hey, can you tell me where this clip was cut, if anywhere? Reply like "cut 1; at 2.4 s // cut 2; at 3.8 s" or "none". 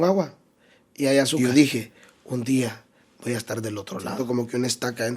cut 1; at 1.4 s // cut 2; at 4.2 s